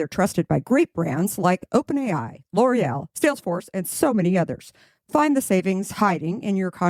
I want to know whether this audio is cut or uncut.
uncut